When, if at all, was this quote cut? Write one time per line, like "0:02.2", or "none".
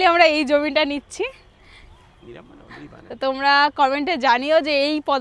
0:03.0